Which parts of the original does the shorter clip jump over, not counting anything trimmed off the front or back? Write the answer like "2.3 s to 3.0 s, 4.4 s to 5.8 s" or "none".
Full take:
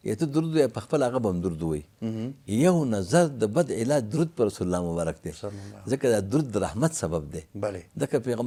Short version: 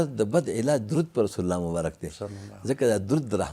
none